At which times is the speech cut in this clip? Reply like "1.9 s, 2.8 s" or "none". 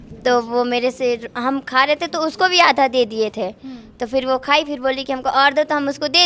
none